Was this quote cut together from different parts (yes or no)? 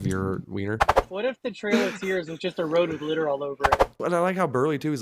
yes